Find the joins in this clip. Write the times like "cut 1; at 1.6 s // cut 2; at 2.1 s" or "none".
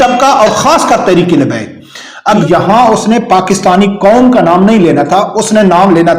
cut 1; at 2.4 s